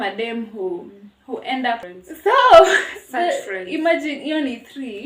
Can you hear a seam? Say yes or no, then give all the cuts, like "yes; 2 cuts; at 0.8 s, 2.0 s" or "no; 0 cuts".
yes; 1 cut; at 1.9 s